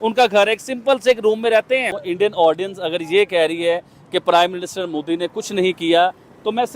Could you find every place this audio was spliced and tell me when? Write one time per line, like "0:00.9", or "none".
0:02.0